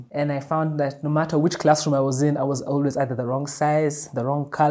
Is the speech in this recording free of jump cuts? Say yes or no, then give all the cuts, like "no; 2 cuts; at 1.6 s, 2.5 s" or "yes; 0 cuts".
yes; 0 cuts